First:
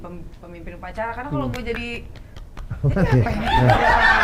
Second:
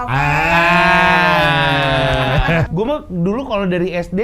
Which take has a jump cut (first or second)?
second